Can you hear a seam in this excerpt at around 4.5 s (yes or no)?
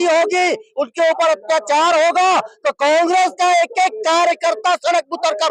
no